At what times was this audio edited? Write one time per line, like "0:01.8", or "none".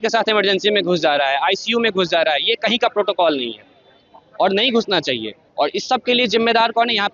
none